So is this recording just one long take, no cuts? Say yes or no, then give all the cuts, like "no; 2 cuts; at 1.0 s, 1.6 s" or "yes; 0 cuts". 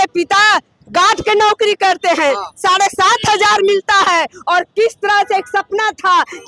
yes; 0 cuts